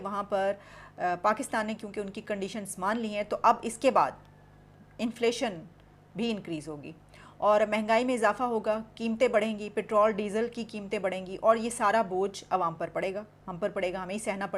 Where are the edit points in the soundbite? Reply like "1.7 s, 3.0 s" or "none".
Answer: none